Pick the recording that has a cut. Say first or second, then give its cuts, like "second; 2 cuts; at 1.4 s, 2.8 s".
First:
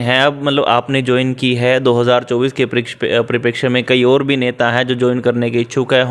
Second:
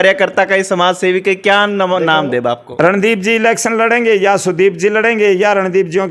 second; 1 cut; at 2.6 s